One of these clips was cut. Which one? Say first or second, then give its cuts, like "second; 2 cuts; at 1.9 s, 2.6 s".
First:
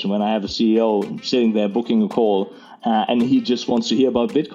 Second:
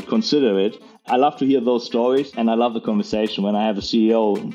second; 2 cuts; at 1.1 s, 2.3 s